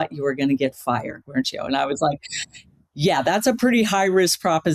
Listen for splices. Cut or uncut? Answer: uncut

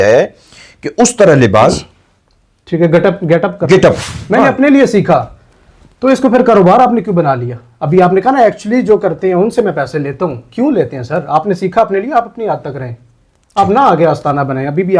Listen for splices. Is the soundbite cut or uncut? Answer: cut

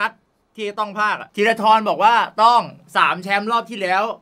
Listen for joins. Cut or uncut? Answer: cut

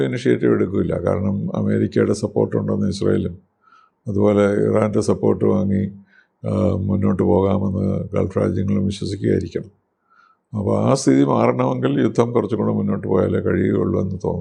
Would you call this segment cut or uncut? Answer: uncut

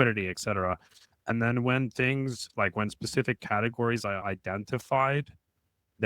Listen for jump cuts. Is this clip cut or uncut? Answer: cut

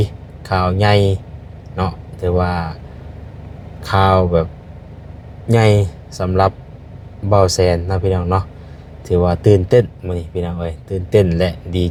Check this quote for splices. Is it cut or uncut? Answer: uncut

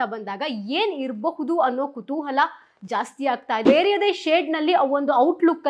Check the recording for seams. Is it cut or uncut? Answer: cut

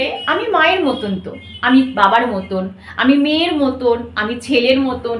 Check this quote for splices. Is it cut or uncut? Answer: uncut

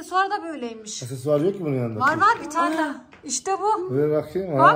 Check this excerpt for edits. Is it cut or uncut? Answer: uncut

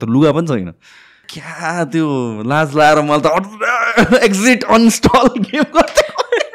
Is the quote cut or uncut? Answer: cut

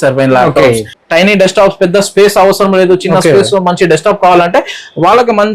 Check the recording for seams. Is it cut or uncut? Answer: cut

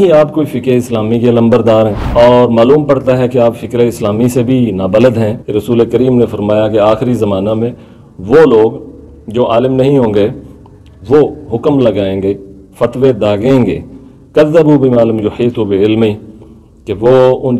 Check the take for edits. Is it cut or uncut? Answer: cut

